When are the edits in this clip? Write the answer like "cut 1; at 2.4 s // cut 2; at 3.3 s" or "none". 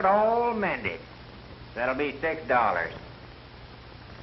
cut 1; at 2.8 s